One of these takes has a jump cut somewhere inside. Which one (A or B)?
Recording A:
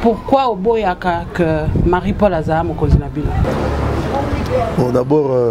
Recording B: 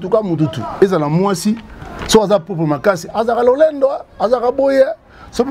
A